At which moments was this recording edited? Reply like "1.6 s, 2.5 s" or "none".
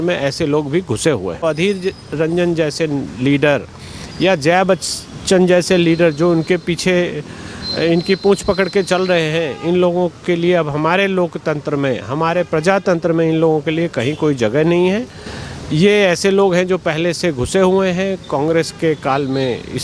1.4 s